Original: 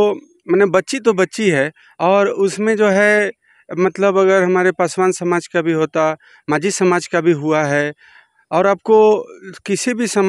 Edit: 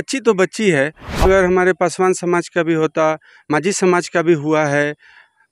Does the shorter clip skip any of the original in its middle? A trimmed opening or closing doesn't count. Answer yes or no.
yes